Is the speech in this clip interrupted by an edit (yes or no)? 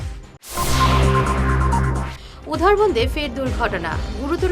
yes